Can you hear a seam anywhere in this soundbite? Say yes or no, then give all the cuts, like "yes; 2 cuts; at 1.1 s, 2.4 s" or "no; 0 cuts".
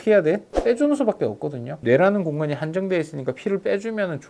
no; 0 cuts